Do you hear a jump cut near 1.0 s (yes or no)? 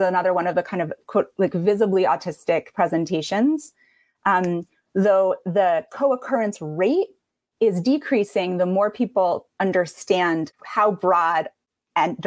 no